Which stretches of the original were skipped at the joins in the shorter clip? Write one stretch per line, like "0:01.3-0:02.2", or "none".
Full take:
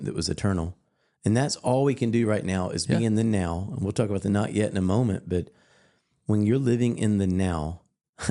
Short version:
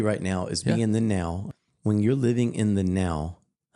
0:03.7-0:05.9